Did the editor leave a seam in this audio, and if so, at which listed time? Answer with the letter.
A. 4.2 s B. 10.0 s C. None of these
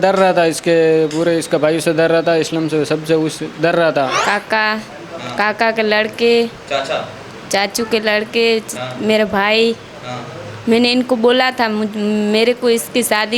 A